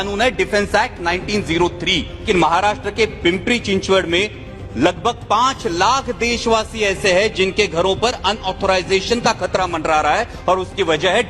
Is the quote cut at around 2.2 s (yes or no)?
yes